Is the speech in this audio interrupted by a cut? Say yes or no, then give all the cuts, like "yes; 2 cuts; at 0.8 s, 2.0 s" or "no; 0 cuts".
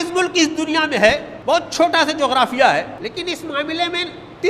yes; 2 cuts; at 1.3 s, 2.9 s